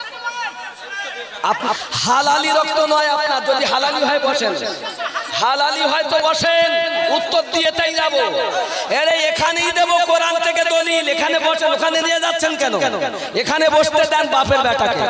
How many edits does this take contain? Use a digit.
1